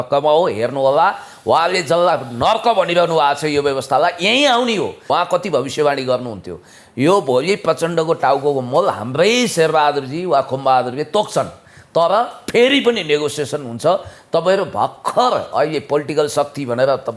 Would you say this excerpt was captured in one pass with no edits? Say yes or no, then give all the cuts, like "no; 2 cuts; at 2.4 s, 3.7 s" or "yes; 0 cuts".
no; 1 cut; at 5.1 s